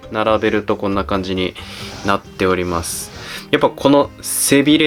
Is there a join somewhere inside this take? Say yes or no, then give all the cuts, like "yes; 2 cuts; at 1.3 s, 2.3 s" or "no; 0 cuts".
no; 0 cuts